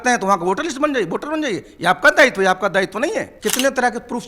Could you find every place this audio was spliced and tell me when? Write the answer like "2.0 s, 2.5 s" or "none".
3.3 s